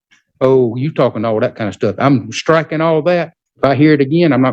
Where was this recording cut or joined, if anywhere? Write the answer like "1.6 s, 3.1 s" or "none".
3.4 s